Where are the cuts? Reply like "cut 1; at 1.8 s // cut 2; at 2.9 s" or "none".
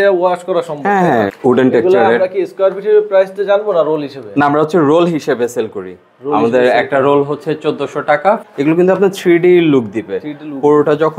cut 1; at 1.3 s // cut 2; at 8.4 s